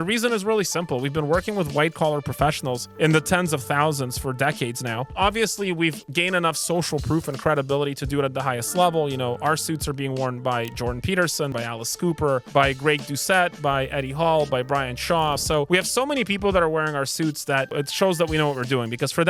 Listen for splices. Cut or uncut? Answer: uncut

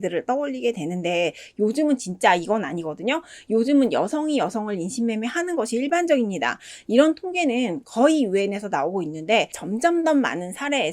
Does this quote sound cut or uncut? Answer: cut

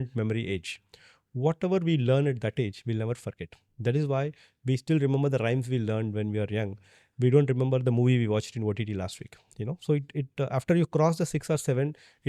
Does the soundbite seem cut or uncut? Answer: uncut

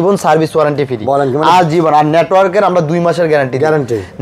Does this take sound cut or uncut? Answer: uncut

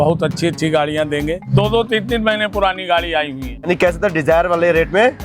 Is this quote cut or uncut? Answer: cut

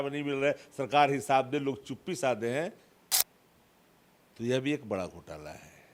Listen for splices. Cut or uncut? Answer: uncut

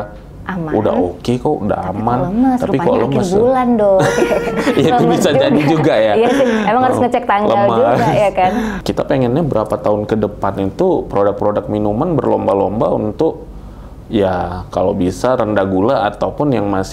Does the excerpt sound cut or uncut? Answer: cut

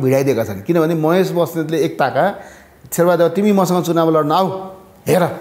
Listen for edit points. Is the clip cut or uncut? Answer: uncut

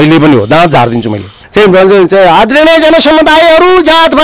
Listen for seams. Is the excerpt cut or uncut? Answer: cut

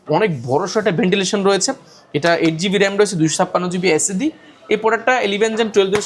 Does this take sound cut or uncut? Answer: uncut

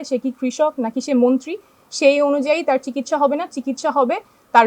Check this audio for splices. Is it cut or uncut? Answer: uncut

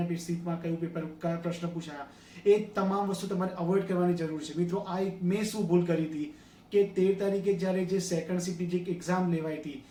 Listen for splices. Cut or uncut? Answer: uncut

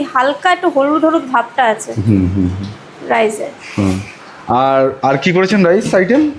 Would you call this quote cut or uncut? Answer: uncut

